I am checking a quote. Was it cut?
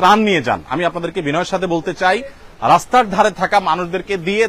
no; 0 cuts

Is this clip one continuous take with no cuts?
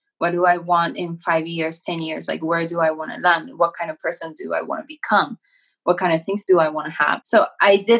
yes; 0 cuts

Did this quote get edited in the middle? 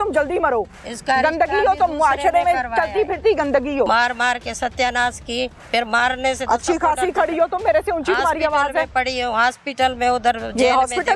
yes; 1 cut; at 3.9 s

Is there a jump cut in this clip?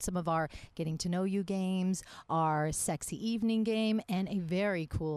no; 0 cuts

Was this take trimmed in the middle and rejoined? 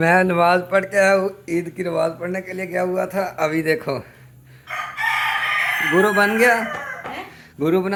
no; 0 cuts

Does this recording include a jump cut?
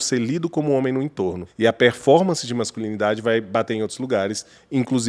yes; 1 cut; at 1.4 s

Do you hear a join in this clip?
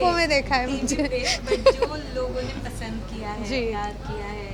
no; 0 cuts

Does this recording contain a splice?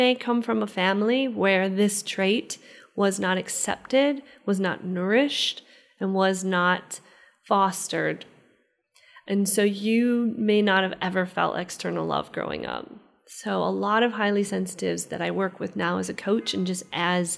no; 0 cuts

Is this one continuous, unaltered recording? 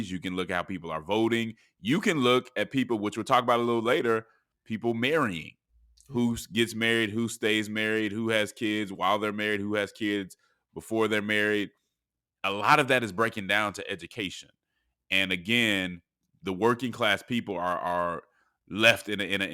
yes; 0 cuts

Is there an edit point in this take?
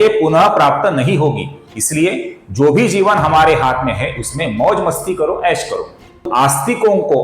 yes; 1 cut; at 6.3 s

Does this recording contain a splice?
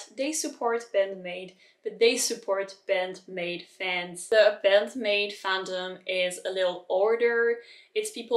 yes; 1 cut; at 4.1 s

